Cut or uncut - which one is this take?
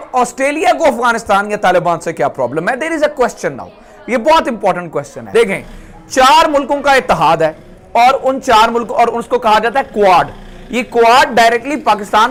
uncut